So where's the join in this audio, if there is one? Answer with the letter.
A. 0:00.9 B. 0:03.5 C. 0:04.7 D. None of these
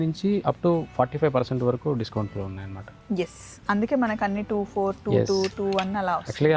D